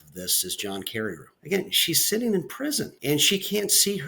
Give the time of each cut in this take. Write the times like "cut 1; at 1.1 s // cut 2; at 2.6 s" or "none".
cut 1; at 1.3 s // cut 2; at 2.9 s